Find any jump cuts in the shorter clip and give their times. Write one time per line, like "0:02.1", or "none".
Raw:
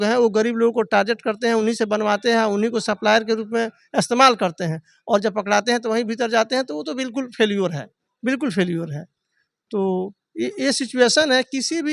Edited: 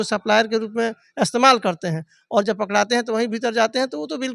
none